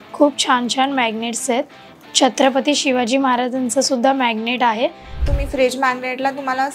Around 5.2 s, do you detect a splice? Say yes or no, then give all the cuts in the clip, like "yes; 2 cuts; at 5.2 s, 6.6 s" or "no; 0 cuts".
yes; 1 cut; at 5.2 s